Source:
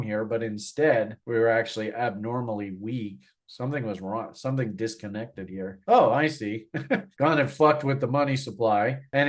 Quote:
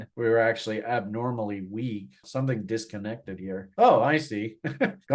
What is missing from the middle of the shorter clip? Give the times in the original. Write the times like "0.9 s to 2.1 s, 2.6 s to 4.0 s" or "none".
3.3 s to 4.3 s

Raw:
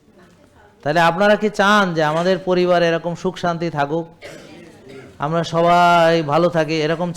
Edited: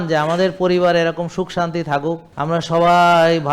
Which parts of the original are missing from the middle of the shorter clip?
4.1 s to 5.1 s

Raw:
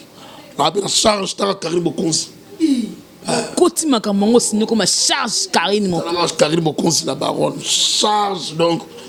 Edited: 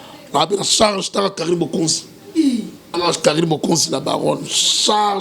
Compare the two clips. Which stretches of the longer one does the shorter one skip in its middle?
3.2 s to 6.1 s

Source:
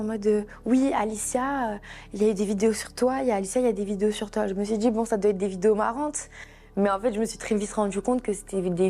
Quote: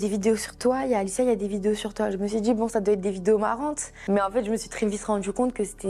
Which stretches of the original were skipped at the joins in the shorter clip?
6.3 s to 6.6 s

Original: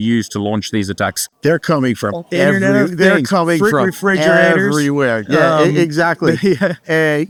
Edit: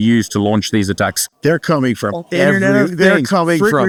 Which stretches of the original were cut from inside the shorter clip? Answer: none

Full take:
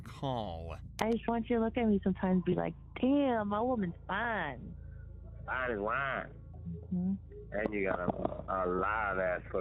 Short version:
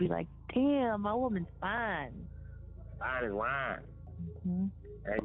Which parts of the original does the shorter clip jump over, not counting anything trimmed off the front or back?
none

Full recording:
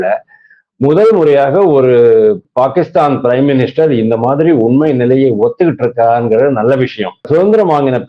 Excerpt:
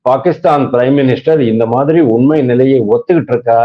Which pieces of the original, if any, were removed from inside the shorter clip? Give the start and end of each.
none

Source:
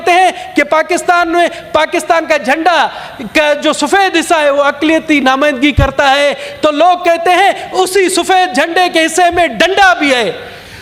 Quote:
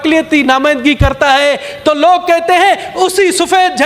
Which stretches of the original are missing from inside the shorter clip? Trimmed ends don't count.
none

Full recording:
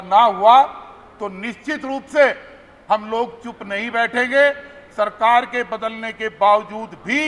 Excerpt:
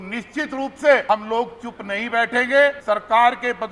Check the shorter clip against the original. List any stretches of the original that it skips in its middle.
2.3 s to 2.8 s, 4.6 s to 4.9 s

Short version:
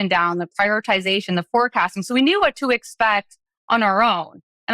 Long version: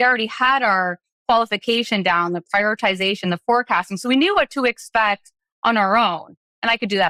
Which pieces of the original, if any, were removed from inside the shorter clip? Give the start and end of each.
none

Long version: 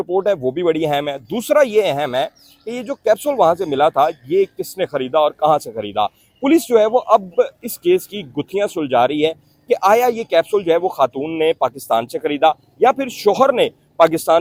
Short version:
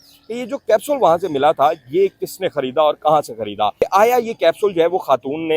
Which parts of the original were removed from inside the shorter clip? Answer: 6.1 s to 9.6 s

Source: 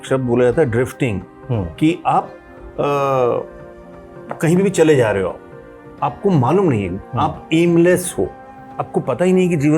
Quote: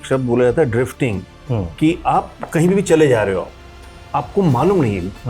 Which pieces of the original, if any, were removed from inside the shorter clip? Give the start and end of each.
2.4 s to 4.3 s

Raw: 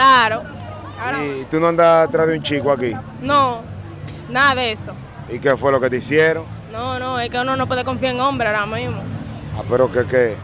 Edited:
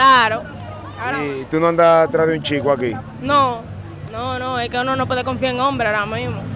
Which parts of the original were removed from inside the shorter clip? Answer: 4.0 s to 6.6 s

